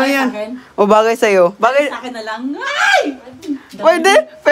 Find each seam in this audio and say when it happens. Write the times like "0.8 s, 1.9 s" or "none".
none